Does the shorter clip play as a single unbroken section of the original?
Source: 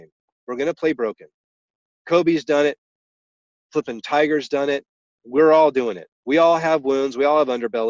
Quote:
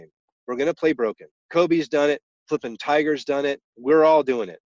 no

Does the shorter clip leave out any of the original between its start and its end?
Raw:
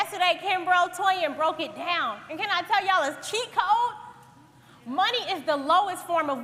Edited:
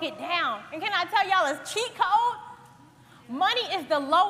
no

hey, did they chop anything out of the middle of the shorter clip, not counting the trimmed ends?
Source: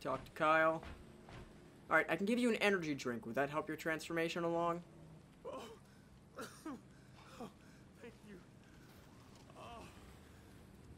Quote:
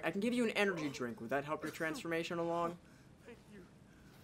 yes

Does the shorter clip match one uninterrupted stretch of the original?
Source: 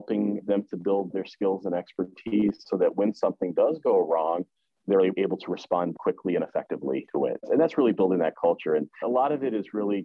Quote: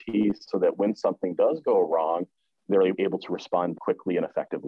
yes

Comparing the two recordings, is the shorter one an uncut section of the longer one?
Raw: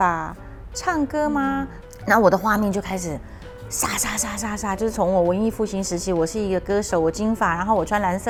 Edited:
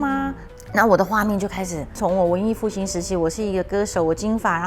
no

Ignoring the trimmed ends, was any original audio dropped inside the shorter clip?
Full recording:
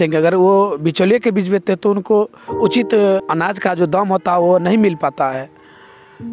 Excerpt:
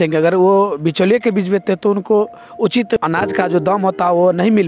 yes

